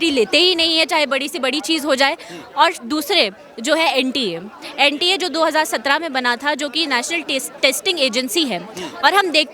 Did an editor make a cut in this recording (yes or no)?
no